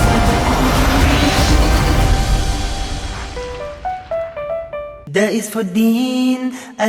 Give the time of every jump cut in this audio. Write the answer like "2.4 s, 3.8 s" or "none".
5.0 s

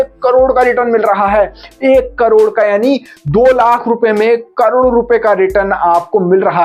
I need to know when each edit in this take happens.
none

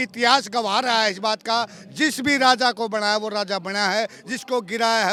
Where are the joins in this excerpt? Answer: none

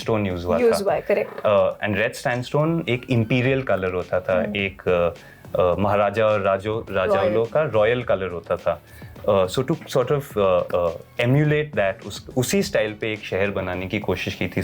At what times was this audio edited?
none

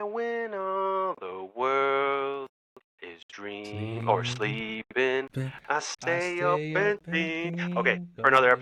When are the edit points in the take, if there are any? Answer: none

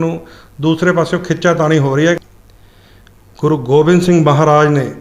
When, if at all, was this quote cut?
2.2 s

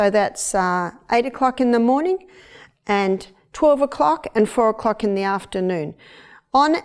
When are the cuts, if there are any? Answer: none

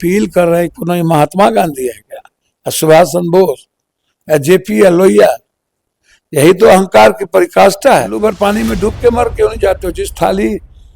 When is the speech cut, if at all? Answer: 8.1 s

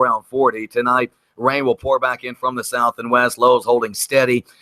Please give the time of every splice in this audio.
none

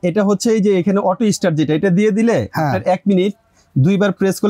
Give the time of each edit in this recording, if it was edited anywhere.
none

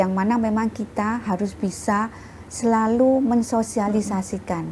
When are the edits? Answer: none

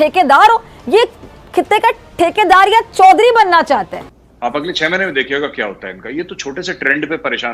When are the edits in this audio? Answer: 3.9 s

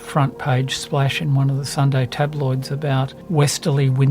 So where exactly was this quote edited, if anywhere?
1.7 s, 3.2 s

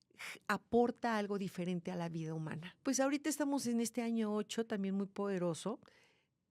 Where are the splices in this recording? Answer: 2.6 s

